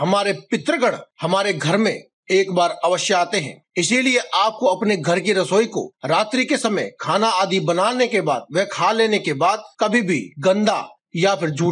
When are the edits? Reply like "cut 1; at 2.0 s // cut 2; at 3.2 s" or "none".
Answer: none